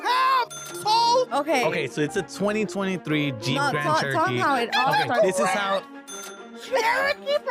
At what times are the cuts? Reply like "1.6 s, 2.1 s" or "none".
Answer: none